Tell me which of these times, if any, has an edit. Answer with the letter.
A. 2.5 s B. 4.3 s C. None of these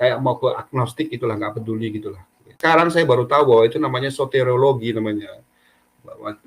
A